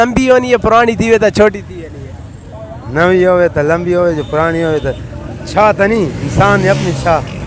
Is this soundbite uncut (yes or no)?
yes